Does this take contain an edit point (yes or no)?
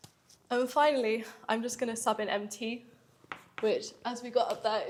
no